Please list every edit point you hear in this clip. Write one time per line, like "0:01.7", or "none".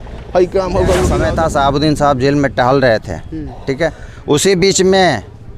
0:01.2